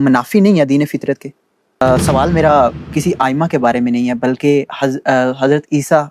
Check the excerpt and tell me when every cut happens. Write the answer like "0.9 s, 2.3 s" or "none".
1.8 s